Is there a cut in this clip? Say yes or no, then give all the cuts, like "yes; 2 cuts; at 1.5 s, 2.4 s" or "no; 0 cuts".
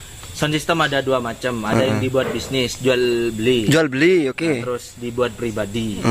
no; 0 cuts